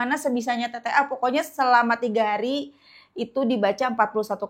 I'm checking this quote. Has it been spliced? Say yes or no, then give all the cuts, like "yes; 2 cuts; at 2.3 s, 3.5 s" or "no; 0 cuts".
no; 0 cuts